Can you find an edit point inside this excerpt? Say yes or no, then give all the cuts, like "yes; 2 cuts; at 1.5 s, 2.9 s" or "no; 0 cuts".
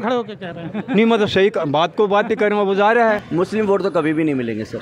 yes; 1 cut; at 3.2 s